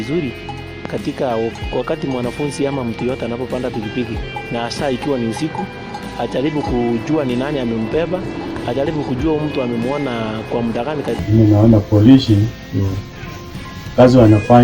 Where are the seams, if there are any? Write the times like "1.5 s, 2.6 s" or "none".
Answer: 11.2 s